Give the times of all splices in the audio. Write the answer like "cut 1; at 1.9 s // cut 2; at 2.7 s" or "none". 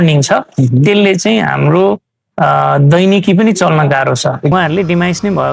cut 1; at 4.5 s